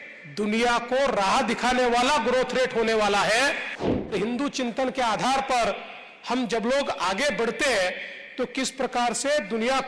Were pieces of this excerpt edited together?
yes; 1 cut; at 4.1 s

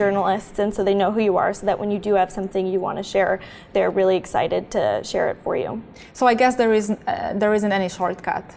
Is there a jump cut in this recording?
no; 0 cuts

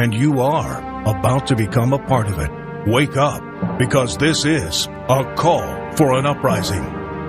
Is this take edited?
no; 0 cuts

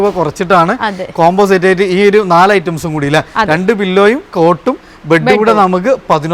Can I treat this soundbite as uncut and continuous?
yes; 0 cuts

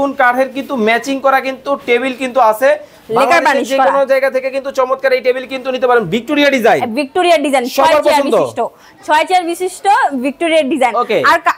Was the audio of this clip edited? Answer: no; 0 cuts

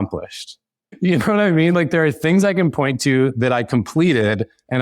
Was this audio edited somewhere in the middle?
no; 0 cuts

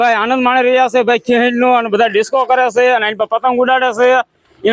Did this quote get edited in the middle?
no; 0 cuts

